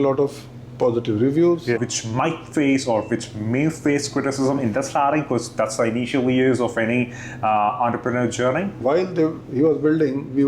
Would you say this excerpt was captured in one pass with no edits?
no; 2 cuts; at 1.8 s, 8.8 s

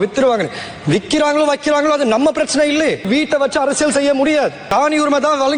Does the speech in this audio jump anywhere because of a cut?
yes; 2 cuts; at 3.1 s, 4.6 s

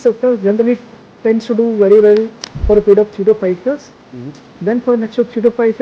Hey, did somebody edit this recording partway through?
no; 0 cuts

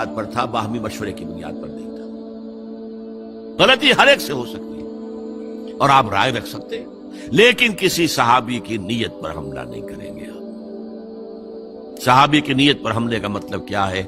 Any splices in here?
yes; 2 cuts; at 1.3 s, 3.4 s

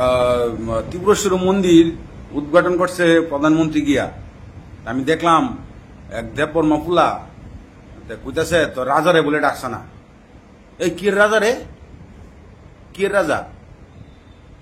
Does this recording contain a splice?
no; 0 cuts

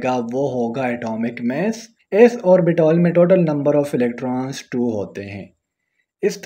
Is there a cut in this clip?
yes; 1 cut; at 2.0 s

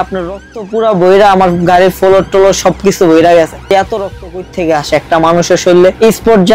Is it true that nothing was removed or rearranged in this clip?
no; 1 cut; at 3.7 s

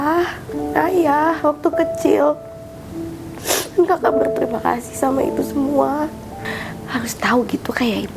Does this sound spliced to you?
yes; 1 cut; at 6.5 s

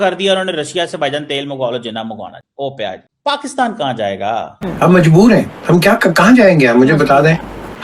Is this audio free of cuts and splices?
no; 2 cuts; at 3.1 s, 4.6 s

